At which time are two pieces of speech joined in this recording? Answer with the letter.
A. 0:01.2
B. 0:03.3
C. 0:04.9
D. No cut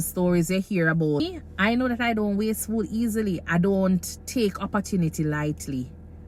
A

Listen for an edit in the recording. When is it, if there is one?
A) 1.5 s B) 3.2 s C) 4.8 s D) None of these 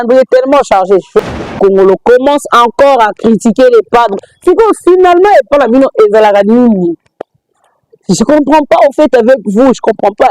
A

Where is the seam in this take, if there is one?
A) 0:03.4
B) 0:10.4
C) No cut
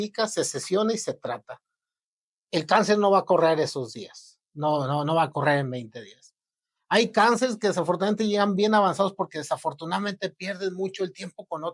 C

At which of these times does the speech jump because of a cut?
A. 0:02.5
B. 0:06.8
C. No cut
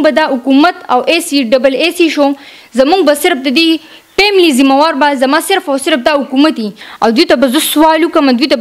B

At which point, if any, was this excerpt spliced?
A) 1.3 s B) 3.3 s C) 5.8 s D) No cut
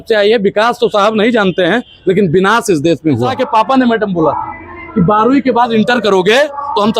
B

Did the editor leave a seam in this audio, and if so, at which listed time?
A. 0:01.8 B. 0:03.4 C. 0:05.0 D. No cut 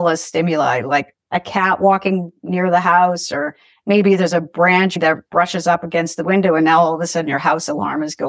C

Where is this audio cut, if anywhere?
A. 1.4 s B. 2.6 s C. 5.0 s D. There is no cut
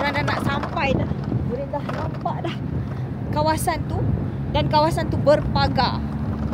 D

